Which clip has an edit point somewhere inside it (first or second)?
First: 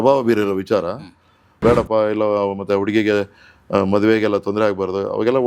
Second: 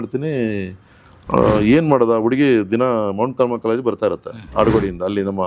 first